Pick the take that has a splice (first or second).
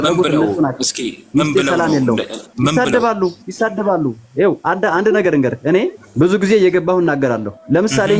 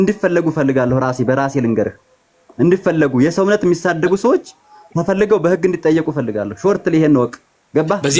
first